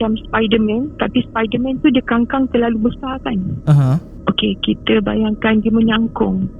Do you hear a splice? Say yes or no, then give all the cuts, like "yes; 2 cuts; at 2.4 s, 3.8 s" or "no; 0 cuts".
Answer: no; 0 cuts